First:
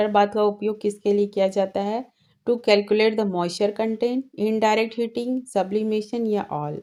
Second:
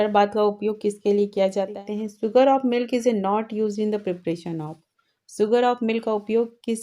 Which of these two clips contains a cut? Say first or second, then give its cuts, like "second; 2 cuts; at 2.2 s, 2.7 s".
second; 1 cut; at 1.8 s